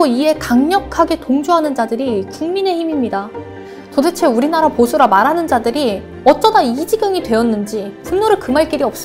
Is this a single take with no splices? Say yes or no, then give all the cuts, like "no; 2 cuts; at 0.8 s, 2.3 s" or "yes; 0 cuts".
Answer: no; 1 cut; at 8.0 s